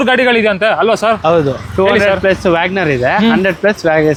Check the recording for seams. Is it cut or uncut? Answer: uncut